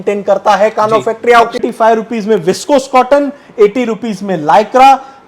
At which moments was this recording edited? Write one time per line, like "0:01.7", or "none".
0:01.6